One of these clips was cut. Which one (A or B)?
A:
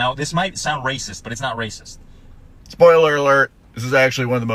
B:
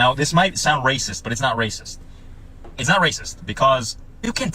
B